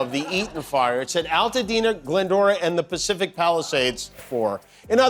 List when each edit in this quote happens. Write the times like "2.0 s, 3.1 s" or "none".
4.0 s